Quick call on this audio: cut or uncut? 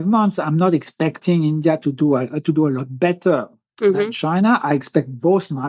uncut